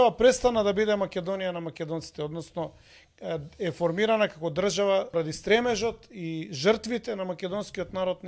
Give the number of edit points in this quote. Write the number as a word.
one